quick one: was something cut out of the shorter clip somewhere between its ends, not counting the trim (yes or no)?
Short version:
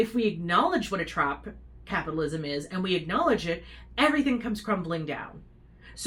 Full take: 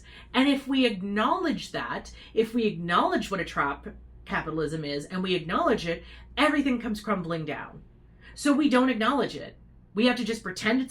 no